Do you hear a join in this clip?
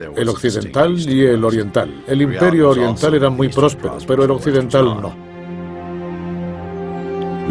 no; 0 cuts

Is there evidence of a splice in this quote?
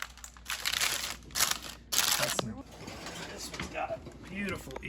yes; 1 cut; at 2.6 s

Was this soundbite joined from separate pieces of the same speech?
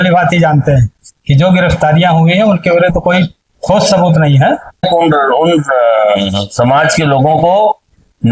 yes; 1 cut; at 4.9 s

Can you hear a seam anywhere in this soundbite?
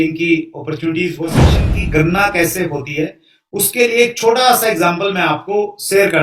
yes; 1 cut; at 1.6 s

